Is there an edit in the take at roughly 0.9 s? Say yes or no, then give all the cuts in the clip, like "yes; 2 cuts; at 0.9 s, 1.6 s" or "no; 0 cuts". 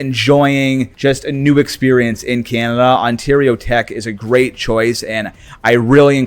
yes; 1 cut; at 0.9 s